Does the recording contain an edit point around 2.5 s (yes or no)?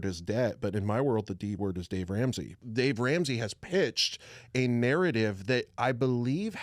yes